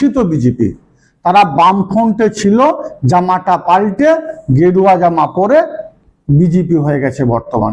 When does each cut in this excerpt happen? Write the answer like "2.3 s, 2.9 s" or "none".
none